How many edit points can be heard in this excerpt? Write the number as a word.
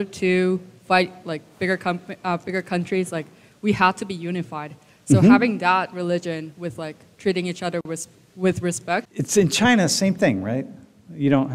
one